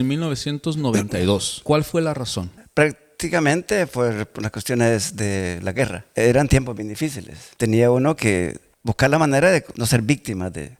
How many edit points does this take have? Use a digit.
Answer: 0